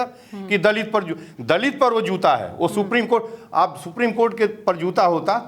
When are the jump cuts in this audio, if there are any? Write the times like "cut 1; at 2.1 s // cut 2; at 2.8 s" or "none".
none

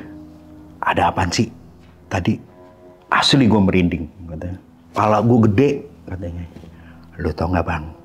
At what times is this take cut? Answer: none

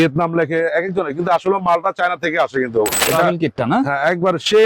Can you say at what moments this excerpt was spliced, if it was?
cut 1; at 3.0 s

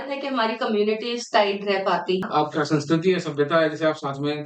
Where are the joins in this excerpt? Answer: cut 1; at 2.3 s

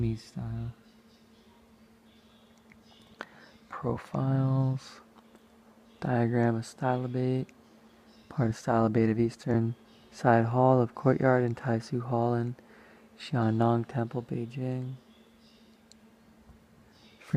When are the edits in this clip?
cut 1; at 4.1 s

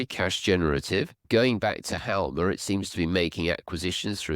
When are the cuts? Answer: cut 1; at 1.2 s

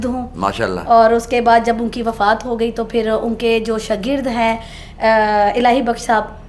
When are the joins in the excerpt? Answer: none

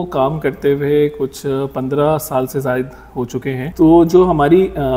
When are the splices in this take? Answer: cut 1; at 3.7 s

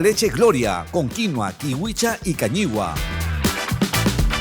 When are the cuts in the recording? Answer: cut 1; at 2.9 s

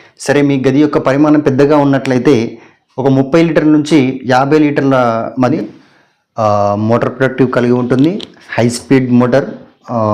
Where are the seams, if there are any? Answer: cut 1; at 5.5 s

